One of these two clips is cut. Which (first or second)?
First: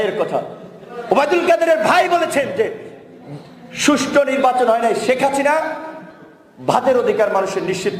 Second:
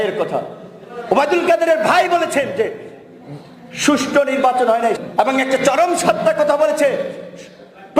second